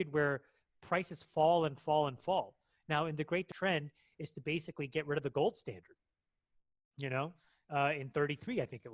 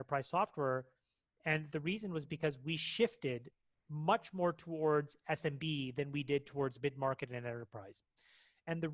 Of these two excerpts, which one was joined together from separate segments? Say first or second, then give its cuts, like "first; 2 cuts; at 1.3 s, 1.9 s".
first; 1 cut; at 3.5 s